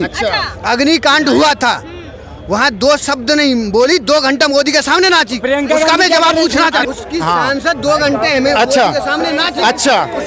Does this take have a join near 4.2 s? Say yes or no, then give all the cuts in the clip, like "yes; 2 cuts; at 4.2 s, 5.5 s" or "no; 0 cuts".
no; 1 cut; at 6.8 s